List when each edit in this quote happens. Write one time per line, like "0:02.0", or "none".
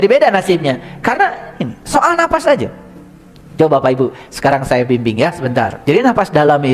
0:05.8